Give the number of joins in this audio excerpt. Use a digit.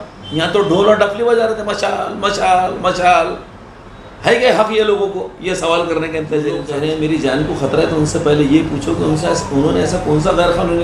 1